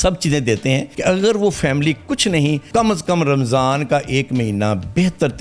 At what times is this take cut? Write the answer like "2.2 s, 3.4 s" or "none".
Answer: 0.9 s, 2.7 s